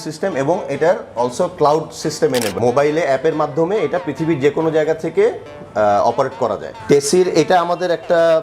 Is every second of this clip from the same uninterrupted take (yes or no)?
no